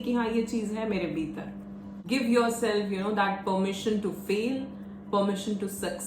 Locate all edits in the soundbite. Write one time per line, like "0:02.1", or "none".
0:02.0